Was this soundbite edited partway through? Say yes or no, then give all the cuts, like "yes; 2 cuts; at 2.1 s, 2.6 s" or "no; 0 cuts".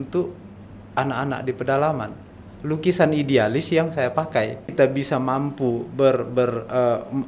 yes; 1 cut; at 4.7 s